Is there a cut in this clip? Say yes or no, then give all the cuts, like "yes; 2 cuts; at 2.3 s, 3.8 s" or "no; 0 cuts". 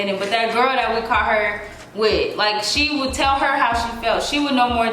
no; 0 cuts